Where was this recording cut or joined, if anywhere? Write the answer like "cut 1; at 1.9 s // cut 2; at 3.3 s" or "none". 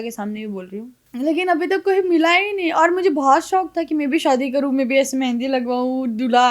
cut 1; at 1.0 s